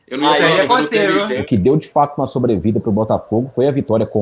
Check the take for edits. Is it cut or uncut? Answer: cut